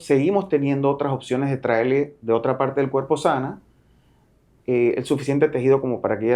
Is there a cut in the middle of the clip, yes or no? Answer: no